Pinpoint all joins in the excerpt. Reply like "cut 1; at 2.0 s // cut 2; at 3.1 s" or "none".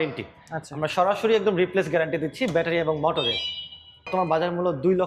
cut 1; at 4.1 s